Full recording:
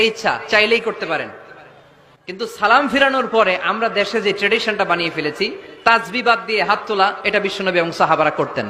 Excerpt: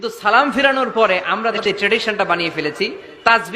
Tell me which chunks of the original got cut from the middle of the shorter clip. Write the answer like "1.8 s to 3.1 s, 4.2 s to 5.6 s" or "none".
4.0 s to 4.2 s